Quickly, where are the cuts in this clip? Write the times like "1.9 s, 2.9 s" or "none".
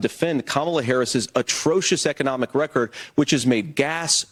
none